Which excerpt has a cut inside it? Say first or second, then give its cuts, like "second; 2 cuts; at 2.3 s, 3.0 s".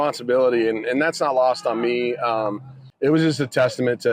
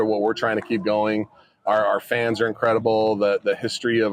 first; 1 cut; at 2.8 s